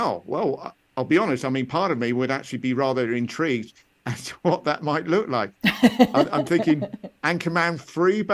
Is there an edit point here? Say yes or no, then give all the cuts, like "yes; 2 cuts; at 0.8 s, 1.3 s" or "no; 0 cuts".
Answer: no; 0 cuts